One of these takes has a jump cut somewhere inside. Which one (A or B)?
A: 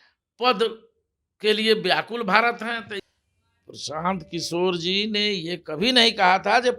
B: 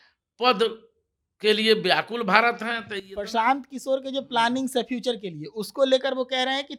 A